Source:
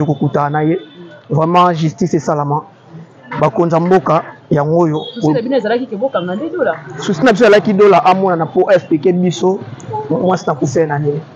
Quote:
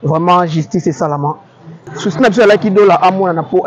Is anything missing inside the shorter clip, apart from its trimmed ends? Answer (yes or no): yes